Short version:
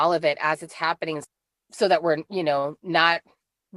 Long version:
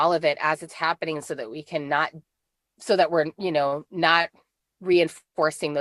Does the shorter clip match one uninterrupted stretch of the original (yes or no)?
no